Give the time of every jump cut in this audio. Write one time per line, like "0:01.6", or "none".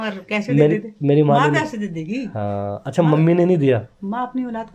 none